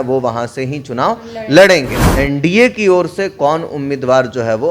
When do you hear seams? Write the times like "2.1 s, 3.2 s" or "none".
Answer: 2.0 s